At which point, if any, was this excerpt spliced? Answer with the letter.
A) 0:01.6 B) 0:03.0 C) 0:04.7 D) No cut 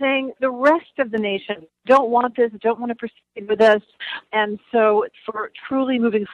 D